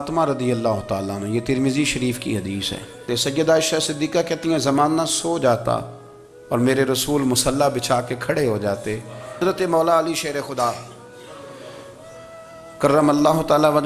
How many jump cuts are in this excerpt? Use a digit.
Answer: 2